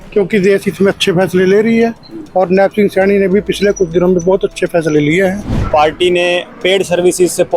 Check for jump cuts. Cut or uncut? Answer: cut